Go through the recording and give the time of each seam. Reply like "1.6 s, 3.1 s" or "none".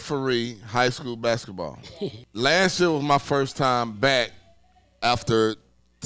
2.2 s